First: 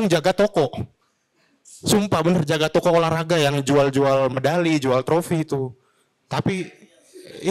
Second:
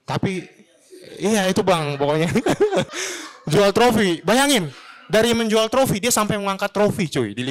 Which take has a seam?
second; 1 cut; at 2.8 s

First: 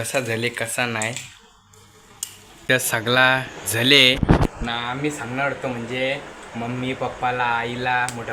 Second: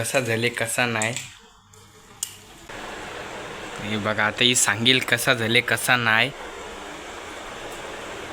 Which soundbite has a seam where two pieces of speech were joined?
second; 1 cut; at 2.5 s

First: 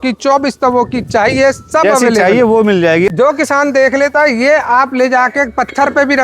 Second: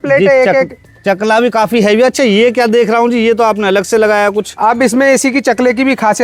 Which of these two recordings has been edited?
first; 1 cut; at 3.1 s

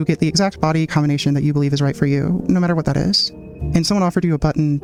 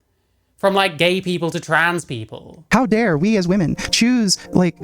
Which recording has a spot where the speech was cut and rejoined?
second; 1 cut; at 2.6 s

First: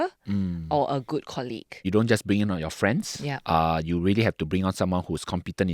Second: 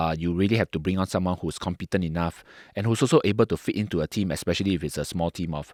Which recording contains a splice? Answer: first; 1 cut; at 1.8 s

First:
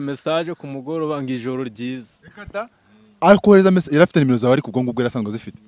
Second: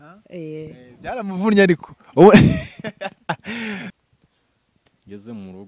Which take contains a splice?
second; 1 cut; at 3.9 s

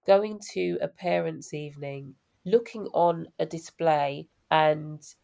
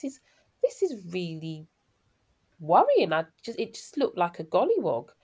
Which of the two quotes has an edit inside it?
first; 2 cuts; at 2.1 s, 4.3 s

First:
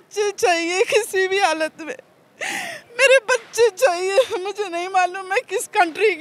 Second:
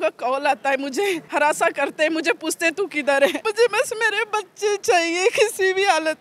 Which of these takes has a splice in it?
second; 2 cuts; at 1.2 s, 3.4 s

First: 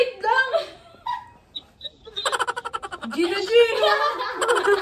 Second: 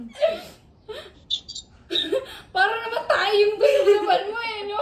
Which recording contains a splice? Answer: first; 2 cuts; at 2.1 s, 3.0 s

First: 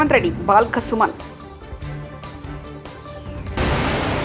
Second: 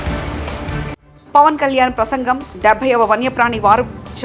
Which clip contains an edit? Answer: second; 1 cut; at 1.1 s

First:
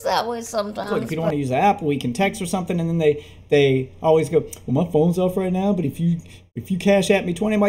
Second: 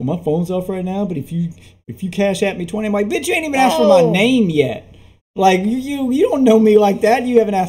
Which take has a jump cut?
first; 1 cut; at 1.0 s

